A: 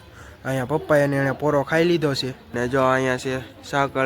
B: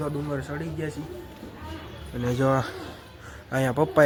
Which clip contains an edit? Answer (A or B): A